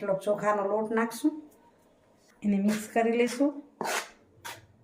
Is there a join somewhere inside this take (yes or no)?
no